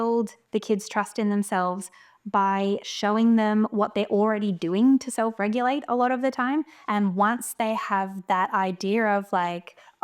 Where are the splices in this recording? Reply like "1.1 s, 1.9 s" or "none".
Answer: 6.8 s